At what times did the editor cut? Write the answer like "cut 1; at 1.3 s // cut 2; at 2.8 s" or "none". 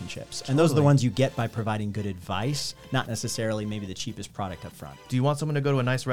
cut 1; at 5.0 s